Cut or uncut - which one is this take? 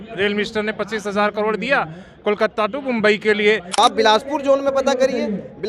cut